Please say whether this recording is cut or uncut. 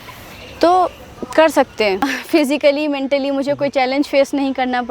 cut